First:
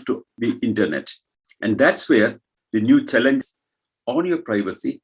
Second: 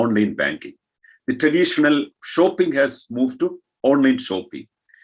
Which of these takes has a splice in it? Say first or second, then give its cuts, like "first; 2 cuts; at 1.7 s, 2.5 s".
first; 1 cut; at 3.4 s